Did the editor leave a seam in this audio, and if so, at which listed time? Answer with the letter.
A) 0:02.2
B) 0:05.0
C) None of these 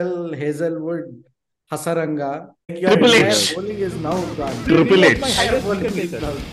C